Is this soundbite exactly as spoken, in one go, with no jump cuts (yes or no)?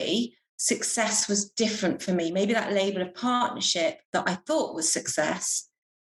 yes